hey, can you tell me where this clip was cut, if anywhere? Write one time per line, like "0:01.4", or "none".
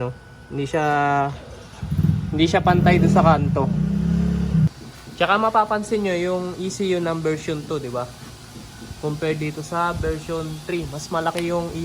0:04.7